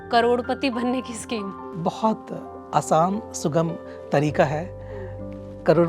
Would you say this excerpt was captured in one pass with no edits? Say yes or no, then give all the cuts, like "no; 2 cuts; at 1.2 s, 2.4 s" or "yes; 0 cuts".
yes; 0 cuts